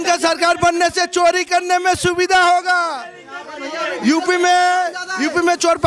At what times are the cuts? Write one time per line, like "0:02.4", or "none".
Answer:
none